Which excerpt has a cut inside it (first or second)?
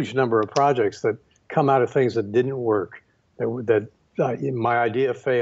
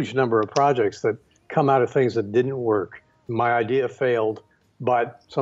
second